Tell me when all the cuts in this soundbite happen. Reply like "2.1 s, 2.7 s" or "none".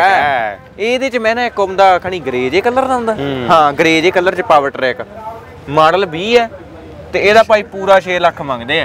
none